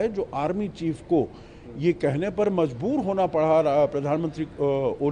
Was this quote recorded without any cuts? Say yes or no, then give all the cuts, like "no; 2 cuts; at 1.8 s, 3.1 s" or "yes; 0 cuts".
yes; 0 cuts